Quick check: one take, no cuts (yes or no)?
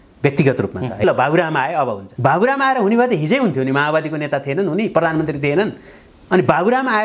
no